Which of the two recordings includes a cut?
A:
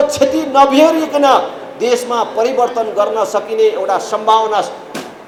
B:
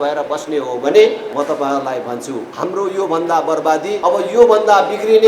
B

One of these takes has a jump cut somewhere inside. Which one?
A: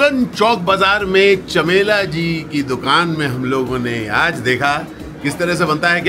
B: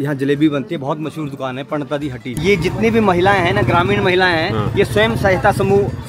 B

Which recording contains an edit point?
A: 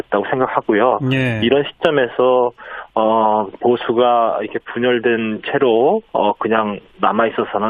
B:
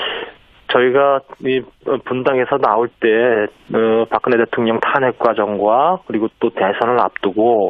B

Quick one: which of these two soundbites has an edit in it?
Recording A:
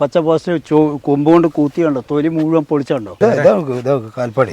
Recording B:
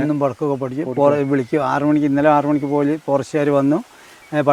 A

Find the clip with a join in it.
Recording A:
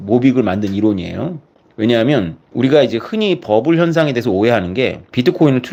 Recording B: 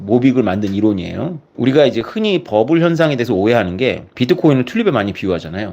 B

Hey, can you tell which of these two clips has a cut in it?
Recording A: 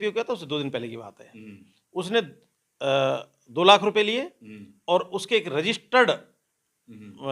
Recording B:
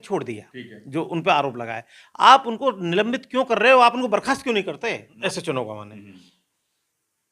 B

